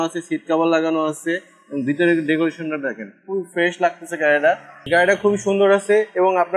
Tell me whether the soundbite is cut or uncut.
uncut